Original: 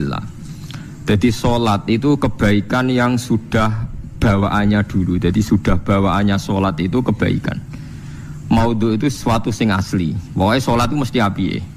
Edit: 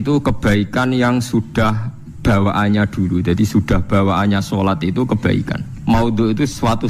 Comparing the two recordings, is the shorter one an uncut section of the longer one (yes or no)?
no